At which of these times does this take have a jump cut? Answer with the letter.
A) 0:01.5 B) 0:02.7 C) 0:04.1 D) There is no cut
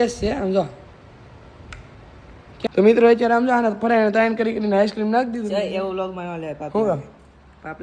B